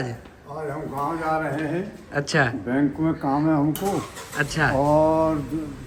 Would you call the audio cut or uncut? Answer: uncut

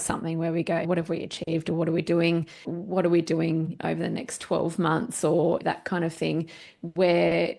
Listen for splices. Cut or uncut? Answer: cut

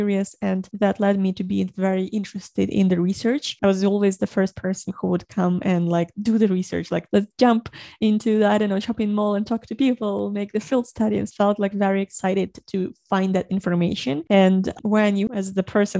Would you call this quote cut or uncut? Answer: cut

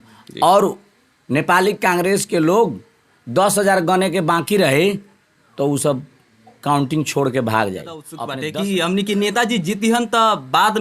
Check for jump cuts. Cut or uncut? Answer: cut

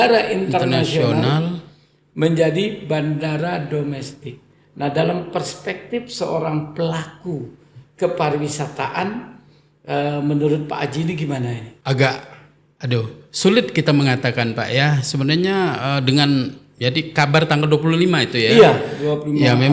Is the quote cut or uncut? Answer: cut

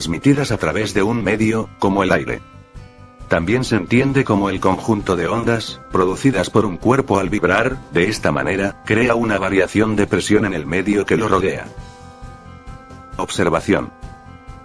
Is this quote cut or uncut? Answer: cut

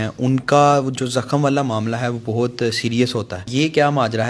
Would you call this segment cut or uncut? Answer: cut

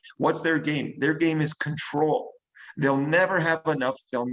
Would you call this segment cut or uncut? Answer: uncut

